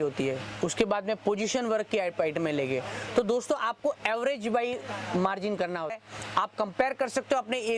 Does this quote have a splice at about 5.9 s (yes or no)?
yes